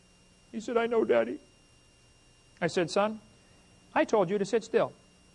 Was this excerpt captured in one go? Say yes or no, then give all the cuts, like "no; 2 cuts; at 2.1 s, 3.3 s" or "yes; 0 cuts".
yes; 0 cuts